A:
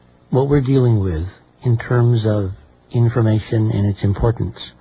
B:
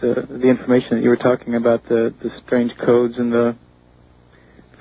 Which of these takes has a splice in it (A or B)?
B